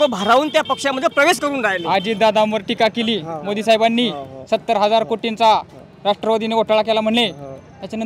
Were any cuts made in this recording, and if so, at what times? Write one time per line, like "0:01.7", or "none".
none